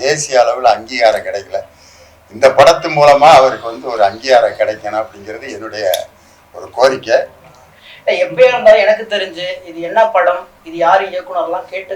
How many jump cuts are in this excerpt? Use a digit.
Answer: 1